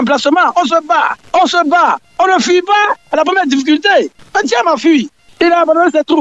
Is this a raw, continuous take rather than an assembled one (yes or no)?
no